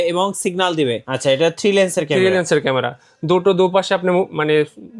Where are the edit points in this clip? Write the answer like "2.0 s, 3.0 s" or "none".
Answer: 1.1 s